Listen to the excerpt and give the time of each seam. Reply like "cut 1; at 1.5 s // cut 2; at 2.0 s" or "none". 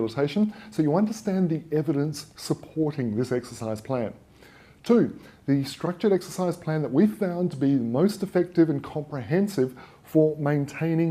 cut 1; at 2.1 s